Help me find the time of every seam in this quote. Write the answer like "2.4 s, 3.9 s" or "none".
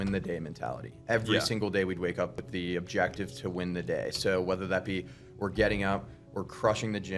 2.4 s